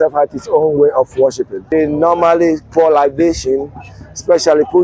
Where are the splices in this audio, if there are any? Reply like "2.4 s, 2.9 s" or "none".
1.5 s